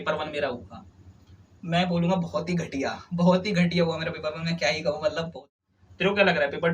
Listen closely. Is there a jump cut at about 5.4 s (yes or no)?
yes